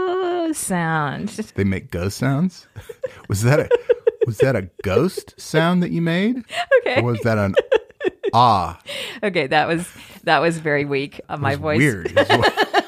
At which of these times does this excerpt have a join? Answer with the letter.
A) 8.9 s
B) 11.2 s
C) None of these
B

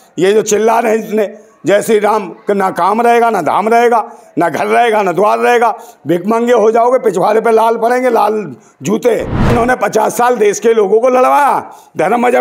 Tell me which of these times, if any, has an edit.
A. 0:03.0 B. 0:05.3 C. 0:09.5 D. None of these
C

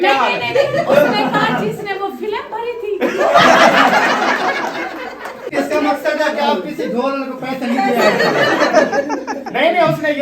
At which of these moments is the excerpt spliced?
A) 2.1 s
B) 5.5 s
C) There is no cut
B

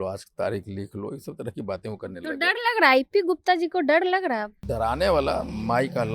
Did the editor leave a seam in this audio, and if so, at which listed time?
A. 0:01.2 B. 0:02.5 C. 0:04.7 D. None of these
C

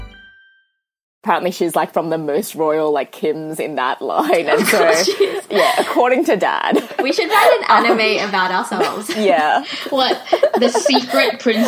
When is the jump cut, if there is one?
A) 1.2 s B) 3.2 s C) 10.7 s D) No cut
A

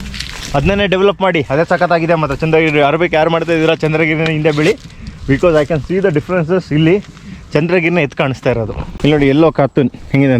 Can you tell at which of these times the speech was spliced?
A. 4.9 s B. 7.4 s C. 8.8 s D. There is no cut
C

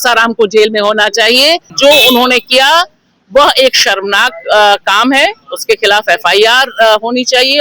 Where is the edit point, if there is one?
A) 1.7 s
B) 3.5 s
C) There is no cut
A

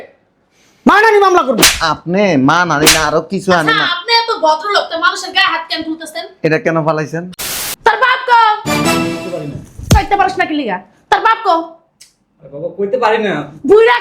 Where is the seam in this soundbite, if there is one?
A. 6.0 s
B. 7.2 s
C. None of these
B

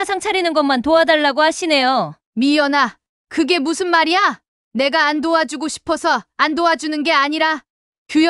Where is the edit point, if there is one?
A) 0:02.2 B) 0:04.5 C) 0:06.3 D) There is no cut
A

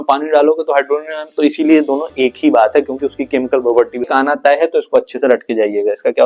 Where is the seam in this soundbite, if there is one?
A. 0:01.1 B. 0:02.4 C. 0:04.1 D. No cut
C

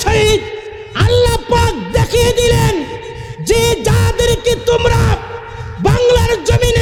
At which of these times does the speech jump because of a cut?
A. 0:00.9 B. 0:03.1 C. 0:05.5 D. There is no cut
D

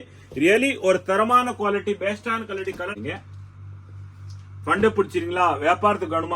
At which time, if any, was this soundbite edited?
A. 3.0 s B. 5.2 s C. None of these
A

